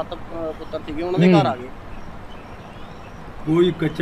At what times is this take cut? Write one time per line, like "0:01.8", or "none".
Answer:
none